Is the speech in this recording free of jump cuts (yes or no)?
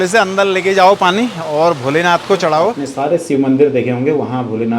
no